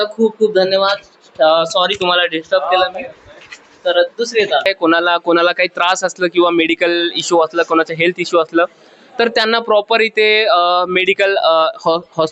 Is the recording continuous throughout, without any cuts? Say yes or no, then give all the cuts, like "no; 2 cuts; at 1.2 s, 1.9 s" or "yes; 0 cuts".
no; 1 cut; at 4.7 s